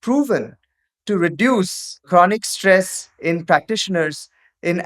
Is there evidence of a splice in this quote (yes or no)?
yes